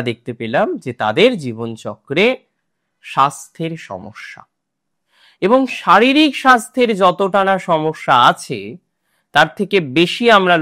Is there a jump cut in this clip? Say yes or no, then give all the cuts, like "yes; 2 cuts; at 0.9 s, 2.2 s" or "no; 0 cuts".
no; 0 cuts